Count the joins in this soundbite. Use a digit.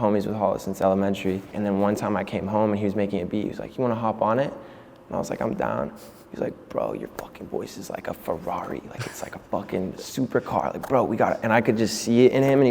1